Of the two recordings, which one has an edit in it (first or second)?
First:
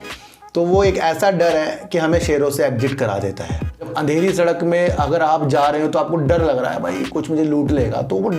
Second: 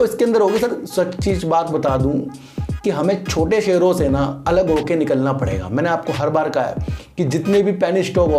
first